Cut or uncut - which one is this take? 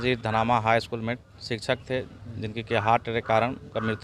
uncut